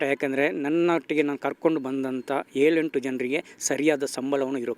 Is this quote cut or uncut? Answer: uncut